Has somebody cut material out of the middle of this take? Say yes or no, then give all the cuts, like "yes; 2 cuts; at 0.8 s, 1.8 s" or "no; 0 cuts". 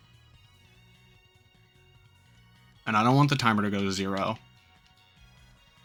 no; 0 cuts